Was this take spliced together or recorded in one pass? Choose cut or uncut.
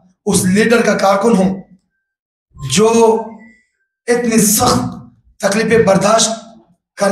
uncut